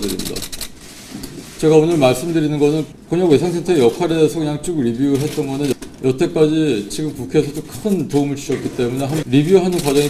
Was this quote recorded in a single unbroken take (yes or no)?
no